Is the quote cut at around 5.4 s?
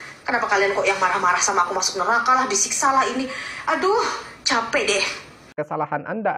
yes; 1 cut; at 5.4 s

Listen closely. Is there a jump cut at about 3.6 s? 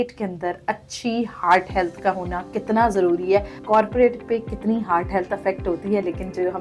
yes; 1 cut; at 3.6 s

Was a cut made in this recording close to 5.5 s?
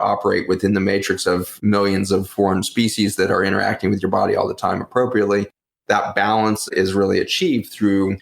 no; 3 cuts; at 1.5 s, 2.3 s, 6.7 s

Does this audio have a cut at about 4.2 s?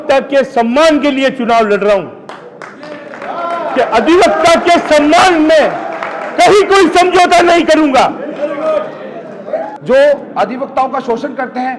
no; 1 cut; at 9.7 s

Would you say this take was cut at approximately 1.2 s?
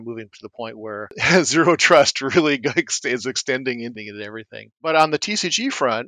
yes; 2 cuts; at 1.2 s, 3.9 s

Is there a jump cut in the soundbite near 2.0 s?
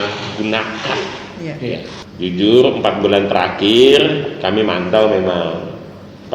yes; 1 cut; at 2.0 s

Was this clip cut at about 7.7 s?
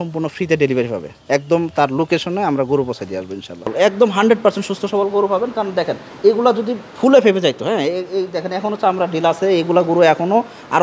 no; 1 cut; at 3.7 s

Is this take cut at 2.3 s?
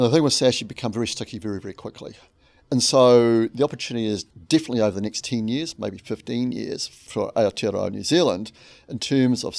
no; 1 cut; at 4.3 s

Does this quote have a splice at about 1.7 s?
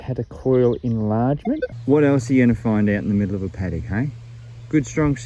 yes; 1 cut; at 1.7 s

